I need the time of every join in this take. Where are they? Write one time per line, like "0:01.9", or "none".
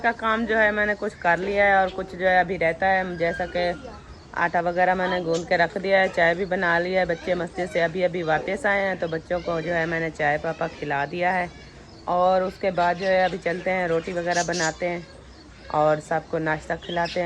none